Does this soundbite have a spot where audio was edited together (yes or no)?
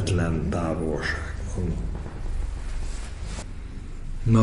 yes